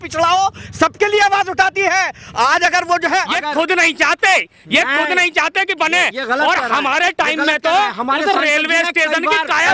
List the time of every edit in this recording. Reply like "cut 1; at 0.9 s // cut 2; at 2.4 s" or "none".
cut 1; at 3.3 s